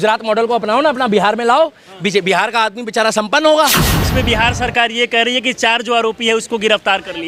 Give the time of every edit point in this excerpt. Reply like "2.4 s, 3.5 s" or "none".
4.1 s